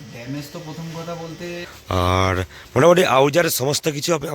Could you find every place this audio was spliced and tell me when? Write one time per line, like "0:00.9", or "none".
0:01.7